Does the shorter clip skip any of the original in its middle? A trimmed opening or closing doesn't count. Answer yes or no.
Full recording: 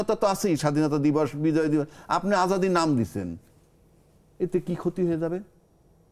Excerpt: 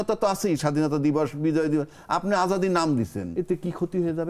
yes